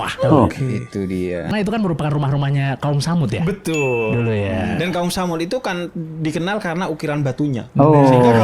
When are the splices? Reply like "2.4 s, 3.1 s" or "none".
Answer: 1.5 s